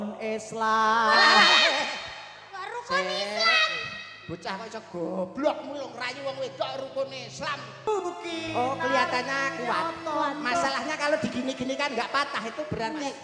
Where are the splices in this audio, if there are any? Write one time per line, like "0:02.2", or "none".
0:07.9

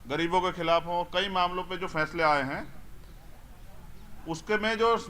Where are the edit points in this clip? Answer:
none

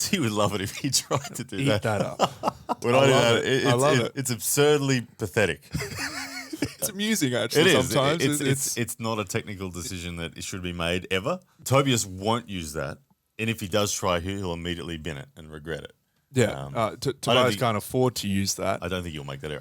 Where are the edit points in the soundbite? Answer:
0:02.7
0:06.8
0:11.5

